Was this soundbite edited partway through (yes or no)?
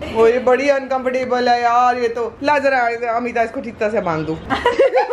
no